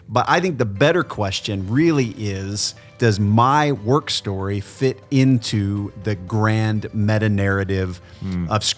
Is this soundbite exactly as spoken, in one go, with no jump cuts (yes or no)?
no